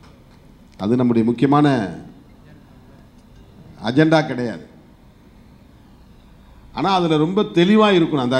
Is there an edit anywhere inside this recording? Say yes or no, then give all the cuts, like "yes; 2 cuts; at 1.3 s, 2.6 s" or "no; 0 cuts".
no; 0 cuts